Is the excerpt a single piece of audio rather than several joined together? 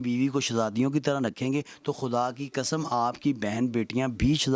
yes; 0 cuts

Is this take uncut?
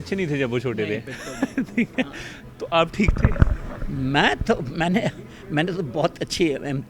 yes; 0 cuts

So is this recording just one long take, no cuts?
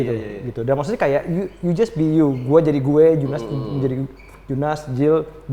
yes; 0 cuts

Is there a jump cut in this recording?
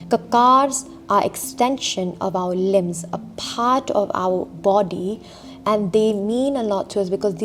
no; 0 cuts

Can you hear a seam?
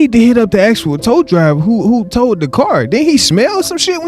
no; 0 cuts

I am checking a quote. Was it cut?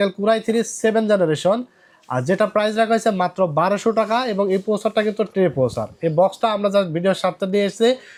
no; 0 cuts

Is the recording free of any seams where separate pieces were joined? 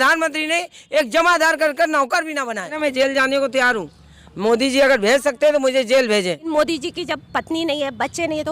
no; 2 cuts; at 2.7 s, 6.5 s

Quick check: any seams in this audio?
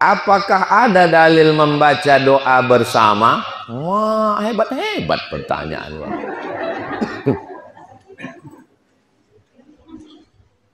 no; 0 cuts

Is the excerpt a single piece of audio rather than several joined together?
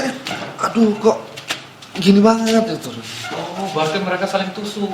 yes; 0 cuts

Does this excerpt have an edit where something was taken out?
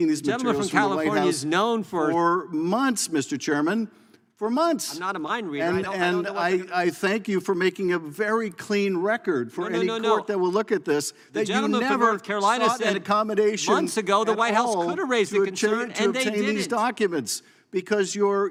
no; 0 cuts

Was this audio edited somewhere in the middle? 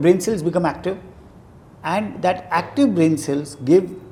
no; 0 cuts

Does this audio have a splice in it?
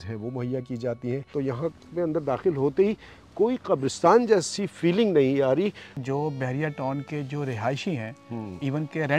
yes; 2 cuts; at 1.3 s, 5.9 s

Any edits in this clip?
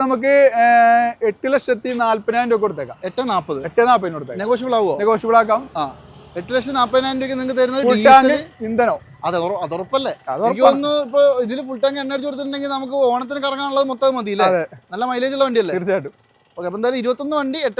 no; 0 cuts

